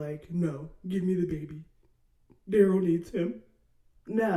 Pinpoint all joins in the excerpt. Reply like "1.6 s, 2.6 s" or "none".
none